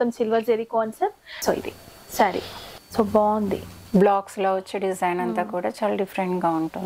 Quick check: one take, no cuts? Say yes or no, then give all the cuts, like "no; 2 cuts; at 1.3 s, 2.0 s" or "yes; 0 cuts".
no; 2 cuts; at 1.3 s, 2.9 s